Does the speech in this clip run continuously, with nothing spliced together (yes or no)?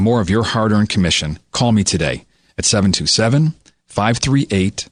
yes